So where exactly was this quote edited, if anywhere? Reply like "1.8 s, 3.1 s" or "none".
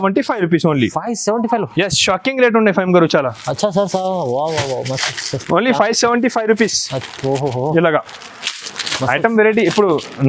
none